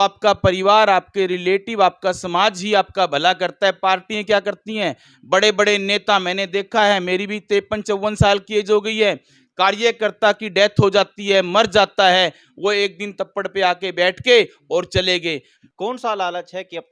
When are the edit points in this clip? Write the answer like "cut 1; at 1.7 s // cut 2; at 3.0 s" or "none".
cut 1; at 15.5 s